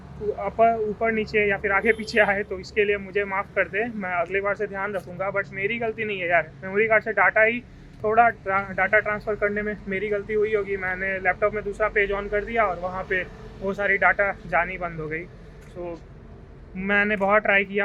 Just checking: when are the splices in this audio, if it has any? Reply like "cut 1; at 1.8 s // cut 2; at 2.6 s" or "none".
cut 1; at 7.9 s